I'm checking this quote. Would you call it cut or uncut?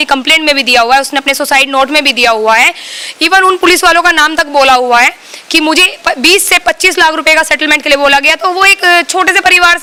uncut